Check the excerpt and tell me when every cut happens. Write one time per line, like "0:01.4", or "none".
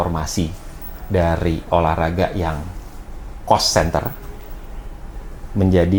none